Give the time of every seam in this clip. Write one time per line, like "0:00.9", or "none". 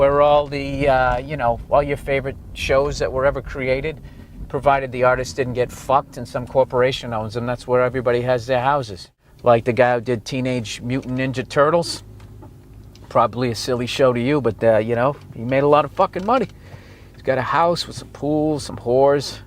0:14.2